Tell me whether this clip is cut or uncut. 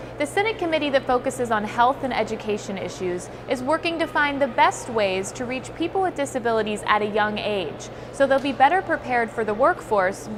uncut